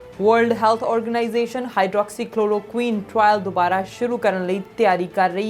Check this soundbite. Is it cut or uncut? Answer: uncut